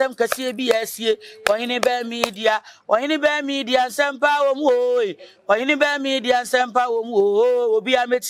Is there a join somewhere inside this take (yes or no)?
no